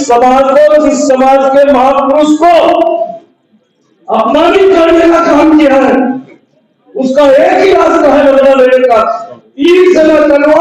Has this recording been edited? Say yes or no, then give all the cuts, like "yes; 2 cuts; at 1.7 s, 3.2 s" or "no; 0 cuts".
no; 0 cuts